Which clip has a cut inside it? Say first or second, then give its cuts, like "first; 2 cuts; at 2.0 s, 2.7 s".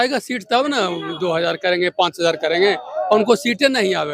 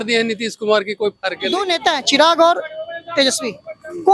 second; 1 cut; at 1.6 s